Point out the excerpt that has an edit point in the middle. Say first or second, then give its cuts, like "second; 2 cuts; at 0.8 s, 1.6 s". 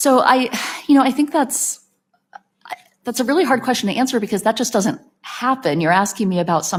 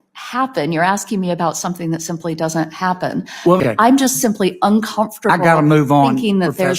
second; 1 cut; at 3.6 s